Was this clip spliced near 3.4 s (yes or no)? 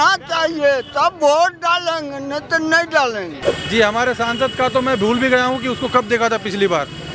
yes